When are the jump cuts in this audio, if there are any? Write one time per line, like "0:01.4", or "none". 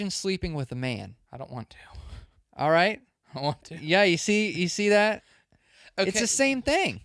none